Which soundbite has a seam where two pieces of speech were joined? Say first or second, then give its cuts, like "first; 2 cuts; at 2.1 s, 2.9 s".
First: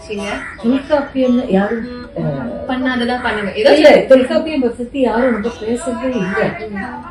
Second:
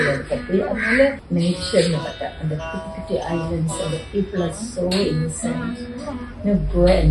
second; 1 cut; at 1.2 s